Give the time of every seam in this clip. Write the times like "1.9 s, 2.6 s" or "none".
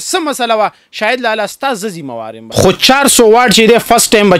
2.4 s